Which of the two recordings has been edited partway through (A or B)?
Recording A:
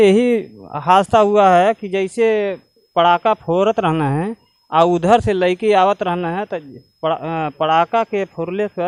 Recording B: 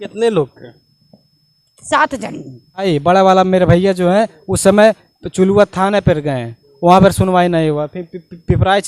B